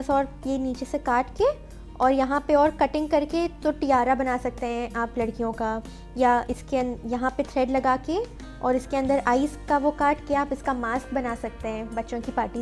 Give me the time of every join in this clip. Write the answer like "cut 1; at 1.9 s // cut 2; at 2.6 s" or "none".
none